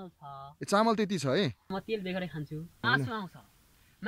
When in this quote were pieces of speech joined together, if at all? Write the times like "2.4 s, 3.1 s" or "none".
1.7 s, 2.8 s